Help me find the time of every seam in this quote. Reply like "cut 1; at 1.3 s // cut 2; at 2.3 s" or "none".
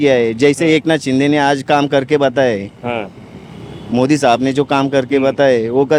none